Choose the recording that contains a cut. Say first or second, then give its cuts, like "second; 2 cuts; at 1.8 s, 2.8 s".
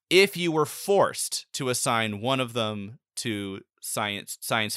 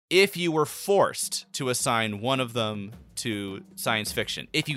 second; 1 cut; at 3.7 s